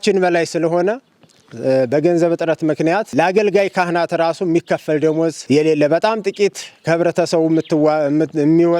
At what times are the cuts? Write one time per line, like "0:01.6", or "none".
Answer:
0:03.1

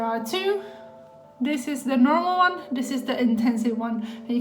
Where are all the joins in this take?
none

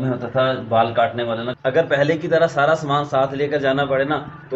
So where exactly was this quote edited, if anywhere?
0:01.5

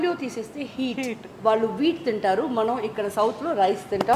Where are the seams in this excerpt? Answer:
0:01.2

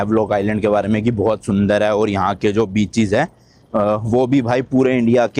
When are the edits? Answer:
none

